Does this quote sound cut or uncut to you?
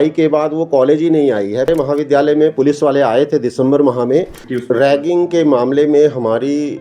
cut